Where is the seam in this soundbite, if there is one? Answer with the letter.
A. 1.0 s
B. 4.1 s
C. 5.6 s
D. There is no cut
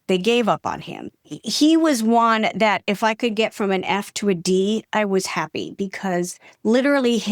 A